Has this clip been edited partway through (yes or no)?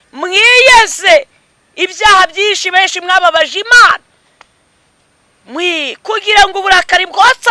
no